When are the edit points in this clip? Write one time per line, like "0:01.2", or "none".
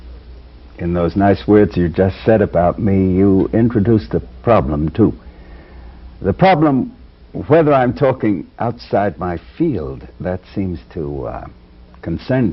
0:01.4